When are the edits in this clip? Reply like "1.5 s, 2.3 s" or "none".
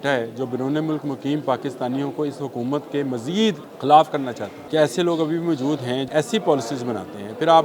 3.7 s, 4.5 s, 6.0 s